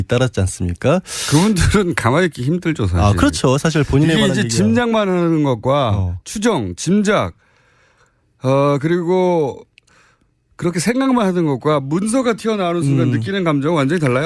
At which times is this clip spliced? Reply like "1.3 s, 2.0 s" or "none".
none